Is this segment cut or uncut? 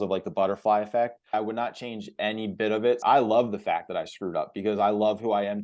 cut